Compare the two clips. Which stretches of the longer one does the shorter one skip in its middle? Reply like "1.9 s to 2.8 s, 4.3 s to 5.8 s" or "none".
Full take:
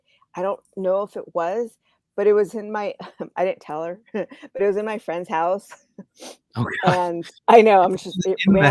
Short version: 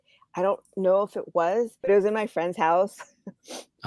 1.8 s to 4.5 s